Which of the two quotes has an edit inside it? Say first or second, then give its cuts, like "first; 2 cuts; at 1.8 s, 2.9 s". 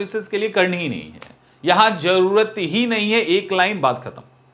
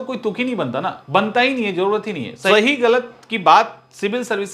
second; 1 cut; at 2.5 s